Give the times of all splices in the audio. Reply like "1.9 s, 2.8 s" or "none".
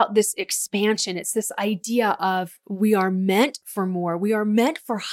none